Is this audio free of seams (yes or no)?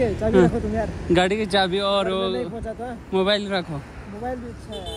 yes